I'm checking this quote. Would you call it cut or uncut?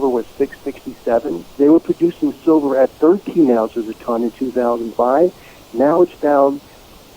cut